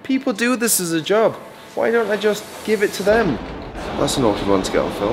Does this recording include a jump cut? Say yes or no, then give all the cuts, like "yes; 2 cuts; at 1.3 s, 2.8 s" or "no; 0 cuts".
yes; 1 cut; at 3.8 s